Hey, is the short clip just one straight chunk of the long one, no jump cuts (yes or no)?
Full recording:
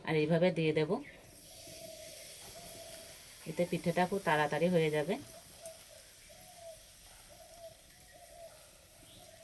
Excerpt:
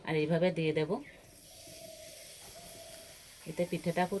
yes